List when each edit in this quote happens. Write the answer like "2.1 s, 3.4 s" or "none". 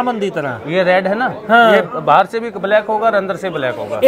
none